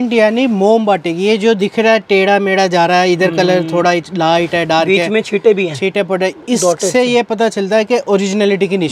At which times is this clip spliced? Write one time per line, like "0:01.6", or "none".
none